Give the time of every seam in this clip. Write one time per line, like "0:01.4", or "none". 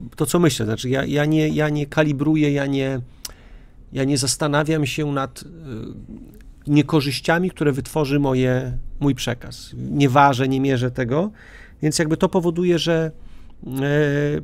none